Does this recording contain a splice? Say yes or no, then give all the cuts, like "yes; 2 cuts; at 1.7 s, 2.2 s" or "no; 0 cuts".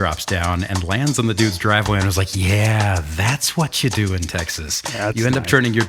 no; 0 cuts